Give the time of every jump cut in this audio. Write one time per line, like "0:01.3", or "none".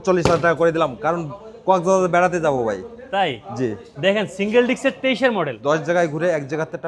0:05.5